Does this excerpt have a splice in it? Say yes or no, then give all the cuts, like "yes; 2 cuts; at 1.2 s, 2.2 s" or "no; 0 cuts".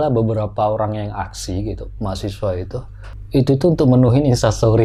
no; 0 cuts